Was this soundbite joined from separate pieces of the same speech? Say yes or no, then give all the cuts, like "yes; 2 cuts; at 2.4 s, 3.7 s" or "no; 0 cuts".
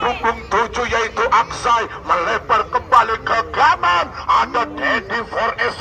no; 0 cuts